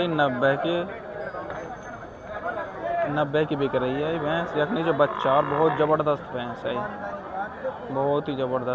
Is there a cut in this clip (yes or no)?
no